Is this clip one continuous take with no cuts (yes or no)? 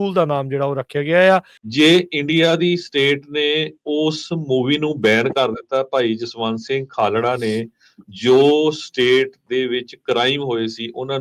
no